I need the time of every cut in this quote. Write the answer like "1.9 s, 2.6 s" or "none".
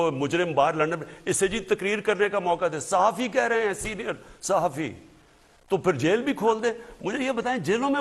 none

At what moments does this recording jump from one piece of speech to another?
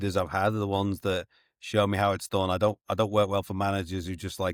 none

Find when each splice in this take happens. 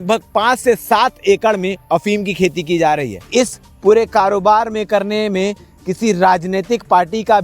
3.2 s

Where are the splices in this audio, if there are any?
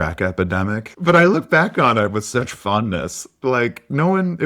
0.9 s

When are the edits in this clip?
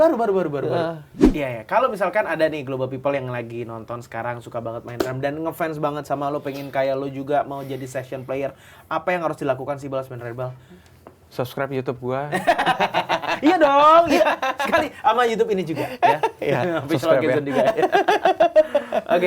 1.2 s

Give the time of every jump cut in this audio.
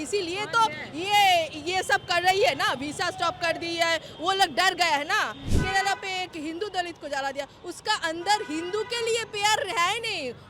5.5 s

